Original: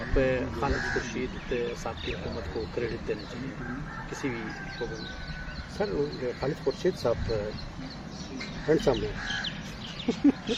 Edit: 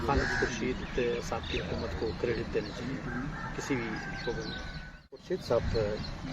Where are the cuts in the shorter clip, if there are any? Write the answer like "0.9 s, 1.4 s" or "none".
5.2 s